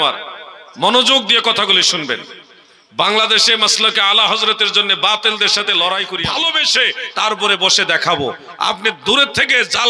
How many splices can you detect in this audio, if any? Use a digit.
1